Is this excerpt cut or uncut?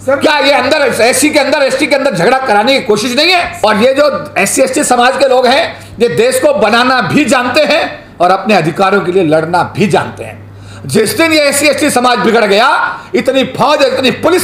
cut